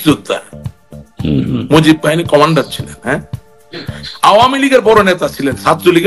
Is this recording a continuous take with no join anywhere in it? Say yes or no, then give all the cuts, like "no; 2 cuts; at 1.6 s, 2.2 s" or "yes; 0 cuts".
yes; 0 cuts